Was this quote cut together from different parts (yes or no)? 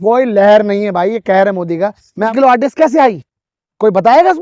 yes